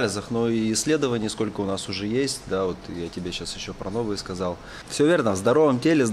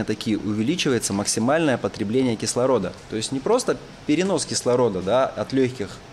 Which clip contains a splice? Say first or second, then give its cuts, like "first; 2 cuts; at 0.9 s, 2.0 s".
first; 1 cut; at 4.8 s